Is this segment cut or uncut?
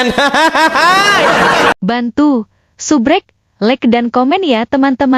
cut